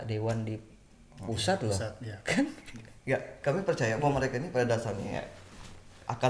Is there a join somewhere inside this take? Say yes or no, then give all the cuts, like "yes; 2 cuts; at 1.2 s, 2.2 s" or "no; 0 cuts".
no; 0 cuts